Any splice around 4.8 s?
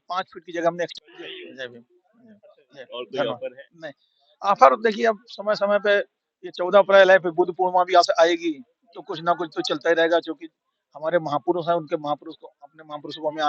no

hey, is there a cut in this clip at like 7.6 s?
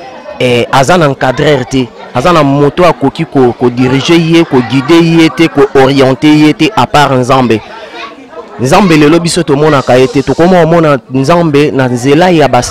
no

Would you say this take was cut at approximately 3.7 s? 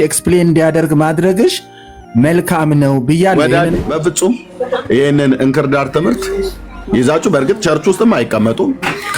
yes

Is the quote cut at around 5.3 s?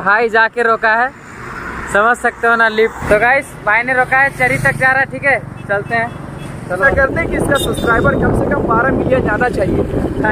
no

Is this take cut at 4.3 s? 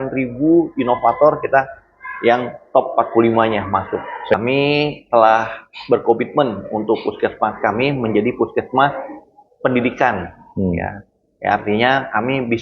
yes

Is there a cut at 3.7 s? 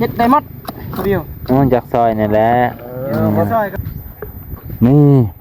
yes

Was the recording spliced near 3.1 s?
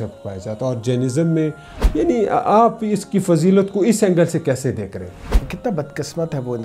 no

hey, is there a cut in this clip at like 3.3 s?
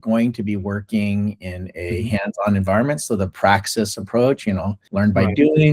no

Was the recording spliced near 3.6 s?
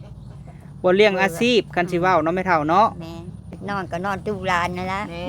yes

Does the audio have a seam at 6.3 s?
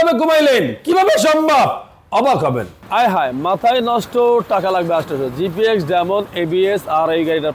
no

